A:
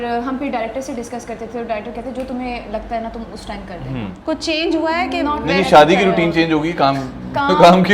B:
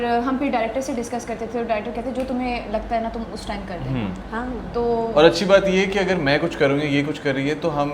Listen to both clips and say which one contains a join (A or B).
A